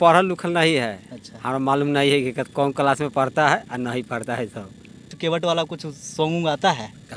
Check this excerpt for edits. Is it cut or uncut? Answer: cut